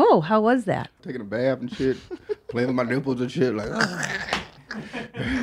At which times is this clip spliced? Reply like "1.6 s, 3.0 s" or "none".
1.0 s